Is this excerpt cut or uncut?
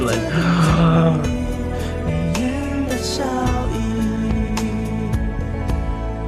uncut